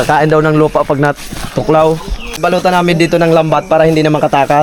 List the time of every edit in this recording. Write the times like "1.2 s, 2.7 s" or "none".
2.2 s